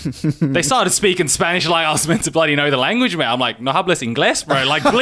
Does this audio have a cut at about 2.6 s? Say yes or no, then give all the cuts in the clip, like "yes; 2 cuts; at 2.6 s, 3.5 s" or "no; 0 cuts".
no; 0 cuts